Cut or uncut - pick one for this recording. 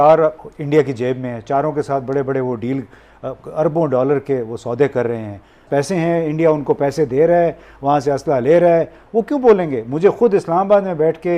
cut